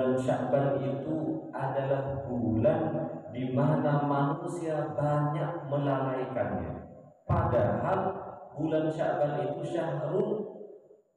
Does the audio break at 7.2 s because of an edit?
yes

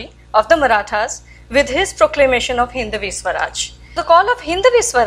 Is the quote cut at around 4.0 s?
yes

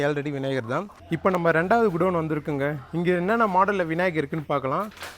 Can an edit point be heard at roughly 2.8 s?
no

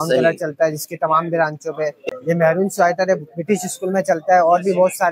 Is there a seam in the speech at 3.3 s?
no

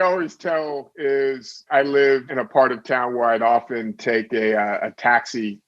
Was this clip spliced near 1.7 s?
yes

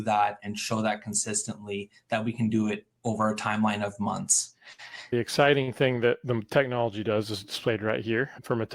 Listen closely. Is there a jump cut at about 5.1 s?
yes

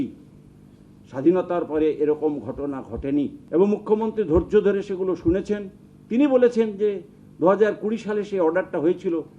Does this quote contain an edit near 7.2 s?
no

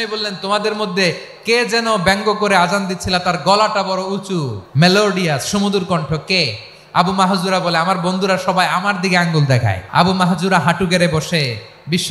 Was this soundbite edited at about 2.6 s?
no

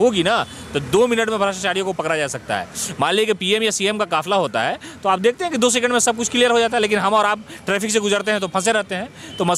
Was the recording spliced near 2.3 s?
no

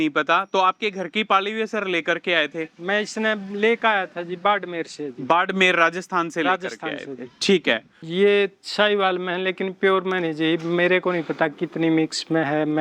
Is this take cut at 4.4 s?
no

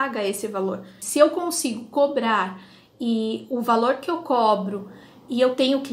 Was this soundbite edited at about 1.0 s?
yes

